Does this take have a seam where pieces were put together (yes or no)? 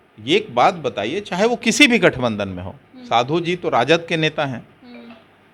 no